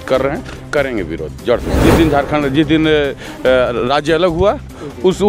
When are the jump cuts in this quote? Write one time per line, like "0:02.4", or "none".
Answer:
0:01.8